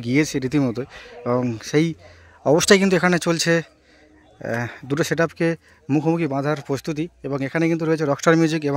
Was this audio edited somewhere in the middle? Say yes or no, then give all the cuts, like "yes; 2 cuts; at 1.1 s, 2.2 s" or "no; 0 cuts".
no; 0 cuts